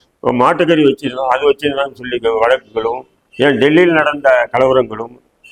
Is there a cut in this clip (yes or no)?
no